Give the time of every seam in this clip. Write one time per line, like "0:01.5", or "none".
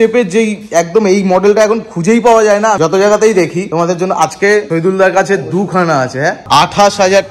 0:02.8
0:03.6
0:04.7
0:06.4